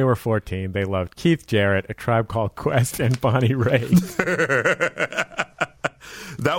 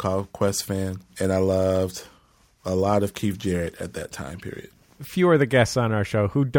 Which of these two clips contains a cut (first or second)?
second